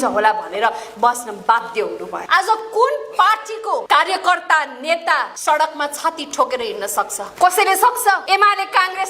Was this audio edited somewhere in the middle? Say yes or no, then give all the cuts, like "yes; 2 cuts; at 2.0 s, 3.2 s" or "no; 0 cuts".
yes; 5 cuts; at 2.1 s, 3.8 s, 5.3 s, 7.2 s, 8.2 s